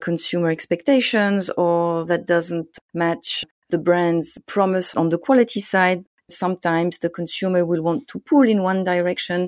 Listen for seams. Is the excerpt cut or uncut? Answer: cut